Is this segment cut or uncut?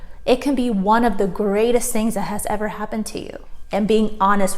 cut